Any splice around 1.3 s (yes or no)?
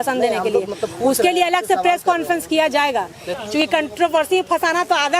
no